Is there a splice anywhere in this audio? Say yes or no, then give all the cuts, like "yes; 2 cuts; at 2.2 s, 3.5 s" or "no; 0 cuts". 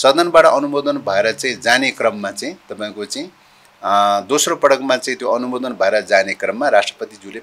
no; 0 cuts